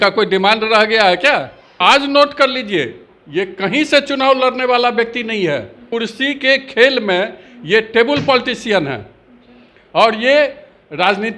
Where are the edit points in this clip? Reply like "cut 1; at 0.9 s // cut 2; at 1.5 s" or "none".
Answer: cut 1; at 1.8 s // cut 2; at 5.8 s